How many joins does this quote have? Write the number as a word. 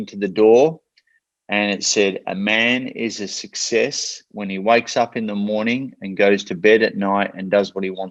zero